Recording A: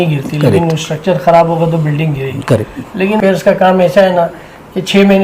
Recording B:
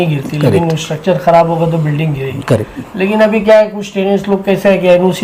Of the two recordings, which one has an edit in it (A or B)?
A